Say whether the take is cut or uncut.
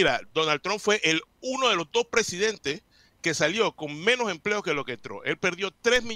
uncut